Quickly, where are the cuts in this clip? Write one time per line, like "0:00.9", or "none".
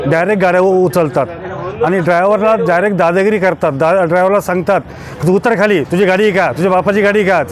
none